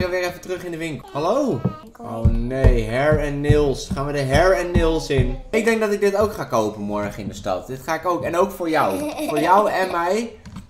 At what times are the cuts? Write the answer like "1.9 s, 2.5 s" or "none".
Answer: 1.0 s, 1.9 s, 5.4 s